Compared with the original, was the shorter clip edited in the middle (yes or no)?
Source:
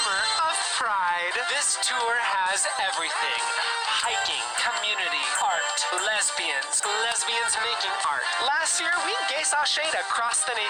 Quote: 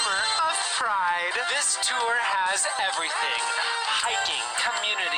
no